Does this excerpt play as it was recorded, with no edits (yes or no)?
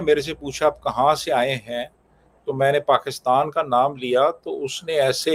yes